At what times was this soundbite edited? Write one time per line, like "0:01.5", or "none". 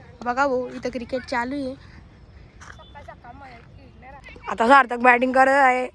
0:04.3